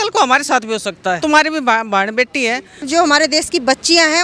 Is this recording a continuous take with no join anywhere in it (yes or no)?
no